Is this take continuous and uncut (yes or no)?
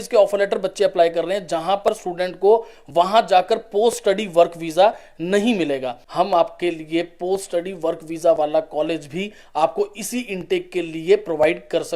no